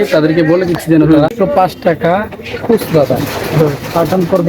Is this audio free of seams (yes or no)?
no